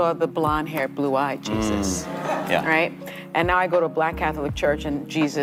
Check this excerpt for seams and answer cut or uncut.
uncut